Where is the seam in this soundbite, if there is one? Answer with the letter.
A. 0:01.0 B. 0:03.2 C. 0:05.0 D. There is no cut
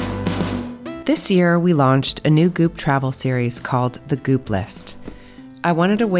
A